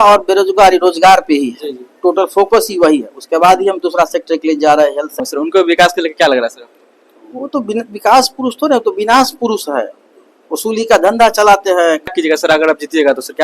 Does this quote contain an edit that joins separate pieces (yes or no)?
yes